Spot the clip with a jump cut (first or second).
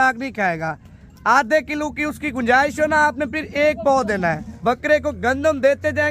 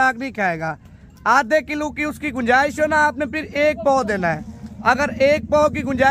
first